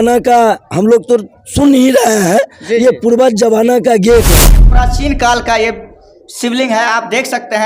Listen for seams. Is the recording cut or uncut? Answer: cut